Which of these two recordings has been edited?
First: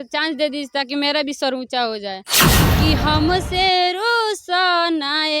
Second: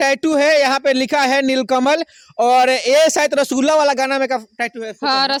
first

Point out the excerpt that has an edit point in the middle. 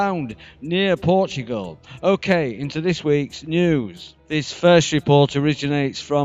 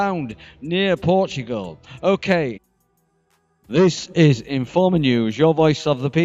first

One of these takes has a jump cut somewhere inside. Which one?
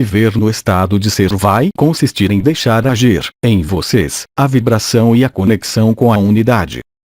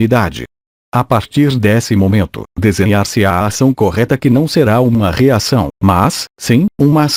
first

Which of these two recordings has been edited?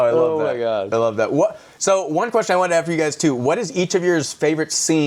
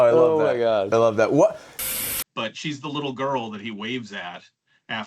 second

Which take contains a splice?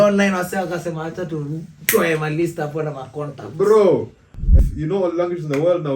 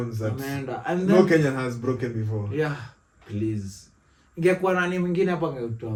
first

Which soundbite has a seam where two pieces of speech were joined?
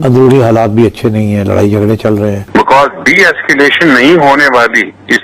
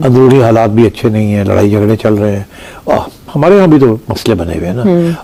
first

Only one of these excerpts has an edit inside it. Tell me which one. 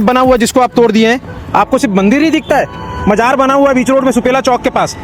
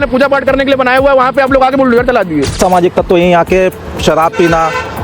second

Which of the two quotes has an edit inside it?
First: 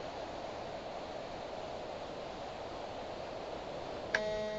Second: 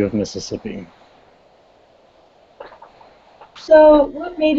second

